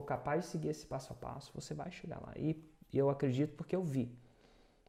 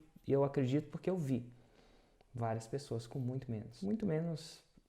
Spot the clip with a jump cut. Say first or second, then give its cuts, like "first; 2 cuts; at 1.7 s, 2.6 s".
second; 1 cut; at 3.7 s